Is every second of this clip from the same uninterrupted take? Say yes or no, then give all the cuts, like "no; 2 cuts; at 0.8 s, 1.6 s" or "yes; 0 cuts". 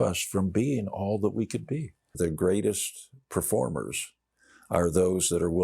no; 1 cut; at 2.1 s